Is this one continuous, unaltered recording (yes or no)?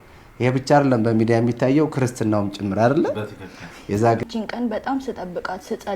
no